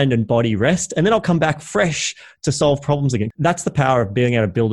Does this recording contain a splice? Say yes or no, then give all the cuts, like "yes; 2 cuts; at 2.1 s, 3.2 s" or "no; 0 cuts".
yes; 1 cut; at 3.3 s